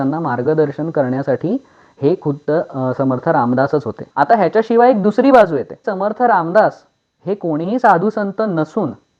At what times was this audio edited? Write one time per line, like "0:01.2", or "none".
0:04.0
0:05.8